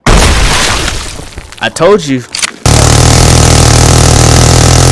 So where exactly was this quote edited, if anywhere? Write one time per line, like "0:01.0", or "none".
0:01.3
0:02.8